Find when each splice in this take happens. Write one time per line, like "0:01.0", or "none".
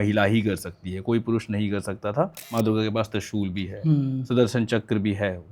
0:02.4